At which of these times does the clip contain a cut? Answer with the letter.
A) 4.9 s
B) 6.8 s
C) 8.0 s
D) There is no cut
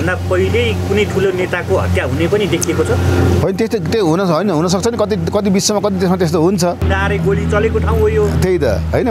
B